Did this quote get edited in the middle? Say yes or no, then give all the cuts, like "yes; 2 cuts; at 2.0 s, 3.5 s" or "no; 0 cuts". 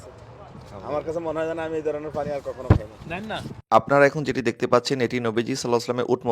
yes; 1 cut; at 3.5 s